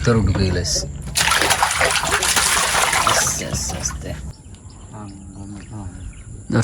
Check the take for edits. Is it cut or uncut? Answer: cut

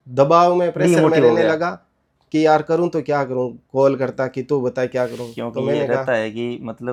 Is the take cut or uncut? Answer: uncut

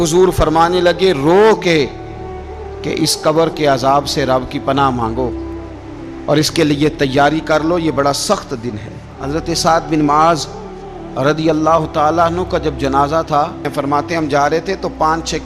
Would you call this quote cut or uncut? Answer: cut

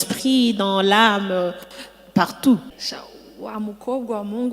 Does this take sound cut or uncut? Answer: cut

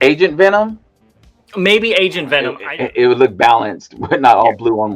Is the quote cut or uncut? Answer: cut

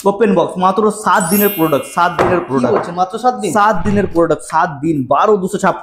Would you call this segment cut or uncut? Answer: uncut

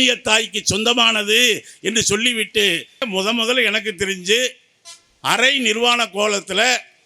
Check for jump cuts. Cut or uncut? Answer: cut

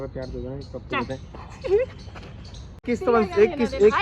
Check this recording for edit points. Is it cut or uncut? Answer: cut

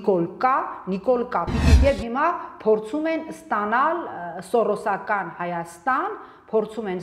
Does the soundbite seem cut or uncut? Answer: cut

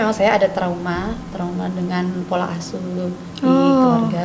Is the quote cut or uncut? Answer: uncut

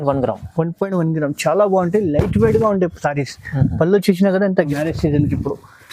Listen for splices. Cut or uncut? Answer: cut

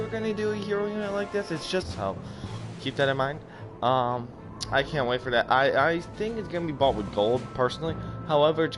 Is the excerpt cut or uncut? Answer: uncut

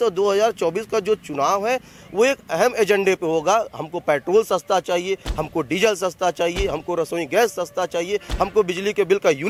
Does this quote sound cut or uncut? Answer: uncut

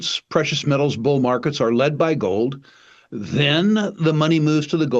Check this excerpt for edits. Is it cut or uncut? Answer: uncut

